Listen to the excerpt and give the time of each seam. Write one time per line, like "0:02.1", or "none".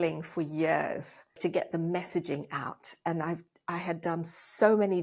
0:01.4